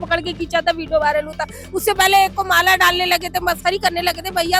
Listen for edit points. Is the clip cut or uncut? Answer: uncut